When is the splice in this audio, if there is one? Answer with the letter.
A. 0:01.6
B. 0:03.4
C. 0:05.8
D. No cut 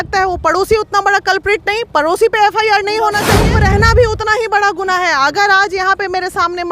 B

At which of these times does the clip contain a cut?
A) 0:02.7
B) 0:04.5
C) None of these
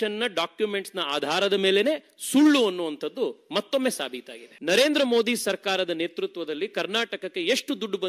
B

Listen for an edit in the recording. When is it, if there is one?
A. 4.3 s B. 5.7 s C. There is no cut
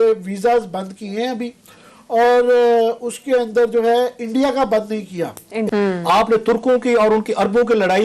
B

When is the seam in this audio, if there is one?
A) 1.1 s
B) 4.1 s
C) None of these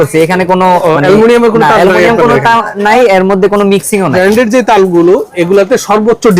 B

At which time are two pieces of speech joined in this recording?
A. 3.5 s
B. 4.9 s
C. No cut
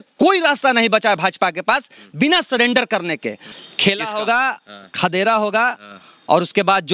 A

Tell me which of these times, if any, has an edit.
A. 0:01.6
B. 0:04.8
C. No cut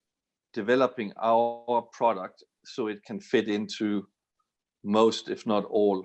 C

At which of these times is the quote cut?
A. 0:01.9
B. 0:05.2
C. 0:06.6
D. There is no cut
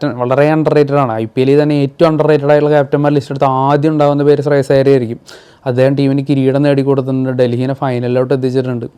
D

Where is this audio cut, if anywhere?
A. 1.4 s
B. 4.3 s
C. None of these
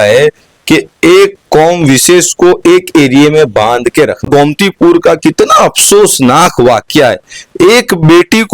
B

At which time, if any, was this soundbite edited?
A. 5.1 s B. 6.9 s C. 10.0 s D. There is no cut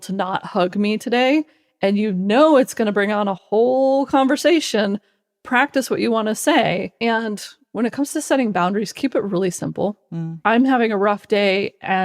B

